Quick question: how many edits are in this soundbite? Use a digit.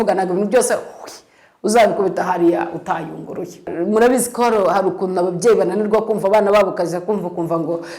1